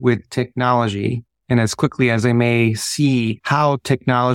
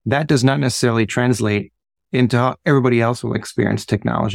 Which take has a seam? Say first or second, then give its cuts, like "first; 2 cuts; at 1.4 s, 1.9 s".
first; 2 cuts; at 1.3 s, 3.4 s